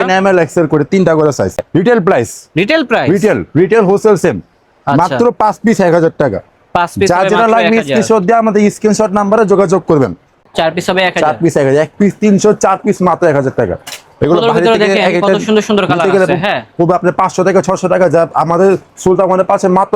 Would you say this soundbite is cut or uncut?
cut